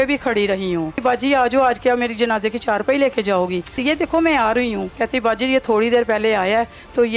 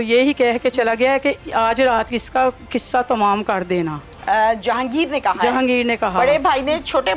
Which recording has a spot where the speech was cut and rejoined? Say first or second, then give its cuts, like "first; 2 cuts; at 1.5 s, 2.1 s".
first; 3 cuts; at 1.0 s, 3.8 s, 4.9 s